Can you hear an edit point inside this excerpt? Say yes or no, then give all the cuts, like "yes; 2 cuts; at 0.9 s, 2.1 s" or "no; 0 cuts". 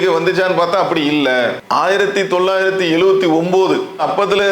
yes; 1 cut; at 1.6 s